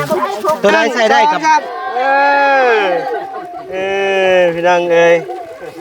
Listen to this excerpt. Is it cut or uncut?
cut